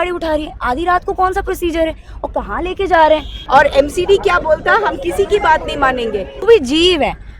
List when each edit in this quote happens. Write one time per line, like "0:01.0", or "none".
0:03.3
0:06.4